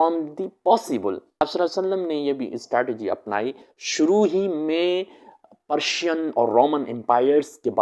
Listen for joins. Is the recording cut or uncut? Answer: cut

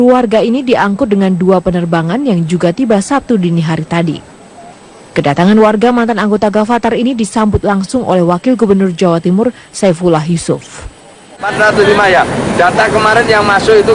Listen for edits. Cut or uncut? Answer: cut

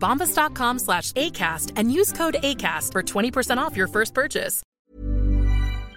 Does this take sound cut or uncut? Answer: cut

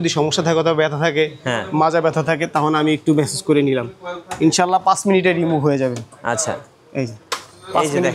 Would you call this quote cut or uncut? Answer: uncut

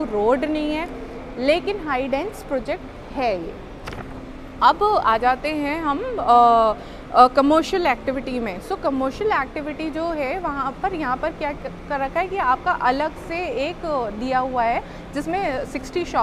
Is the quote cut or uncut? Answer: uncut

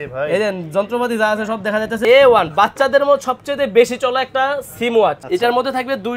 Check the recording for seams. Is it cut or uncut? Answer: cut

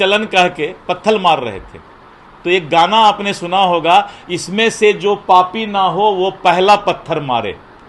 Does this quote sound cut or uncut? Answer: uncut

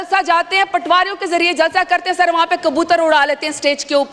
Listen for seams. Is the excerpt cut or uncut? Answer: uncut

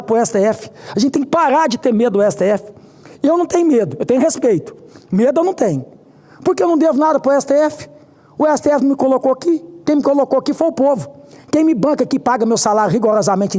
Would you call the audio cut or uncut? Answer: uncut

